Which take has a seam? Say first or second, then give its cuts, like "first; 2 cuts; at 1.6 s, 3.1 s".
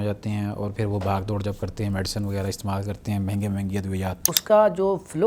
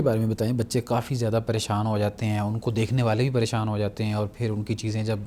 first; 1 cut; at 4.4 s